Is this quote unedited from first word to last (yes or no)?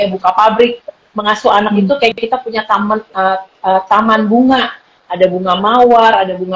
yes